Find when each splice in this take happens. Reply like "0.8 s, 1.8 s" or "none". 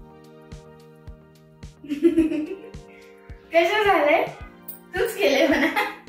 1.8 s